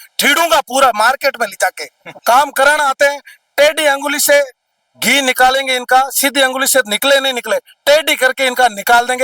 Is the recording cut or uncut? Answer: cut